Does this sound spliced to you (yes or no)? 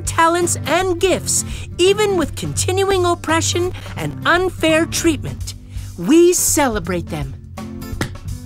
yes